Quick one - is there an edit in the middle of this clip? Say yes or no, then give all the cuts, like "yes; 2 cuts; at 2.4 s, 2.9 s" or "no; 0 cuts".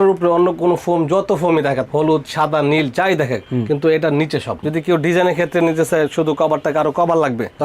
yes; 1 cut; at 4.6 s